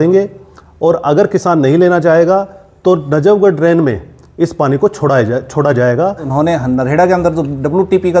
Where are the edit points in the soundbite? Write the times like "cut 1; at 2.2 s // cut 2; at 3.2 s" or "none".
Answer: cut 1; at 6.3 s